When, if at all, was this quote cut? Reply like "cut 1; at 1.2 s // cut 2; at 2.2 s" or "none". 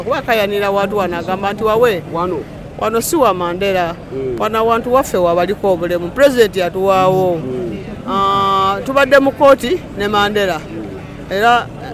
none